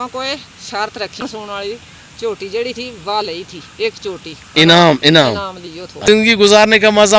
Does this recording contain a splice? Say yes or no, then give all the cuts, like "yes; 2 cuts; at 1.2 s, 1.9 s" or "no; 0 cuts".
yes; 2 cuts; at 1.2 s, 6.0 s